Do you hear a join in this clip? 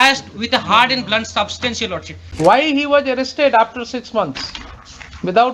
yes; 1 cut; at 2.2 s

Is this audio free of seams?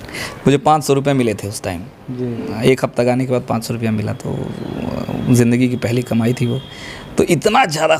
yes; 0 cuts

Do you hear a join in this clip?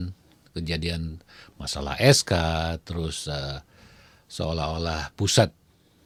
no; 0 cuts

